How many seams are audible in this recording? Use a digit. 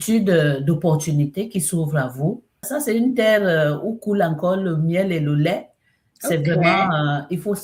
1